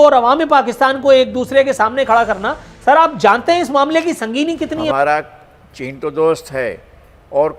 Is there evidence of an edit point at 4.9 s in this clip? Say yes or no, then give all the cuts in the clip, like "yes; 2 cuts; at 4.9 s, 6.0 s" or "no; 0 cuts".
yes; 1 cut; at 4.9 s